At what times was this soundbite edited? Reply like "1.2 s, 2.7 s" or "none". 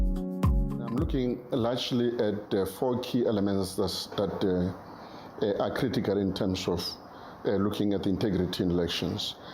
0.9 s